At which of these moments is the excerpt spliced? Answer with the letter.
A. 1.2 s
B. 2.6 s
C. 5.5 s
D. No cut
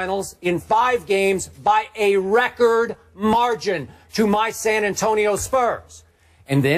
A